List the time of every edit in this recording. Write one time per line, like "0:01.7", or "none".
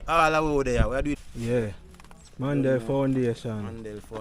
0:01.2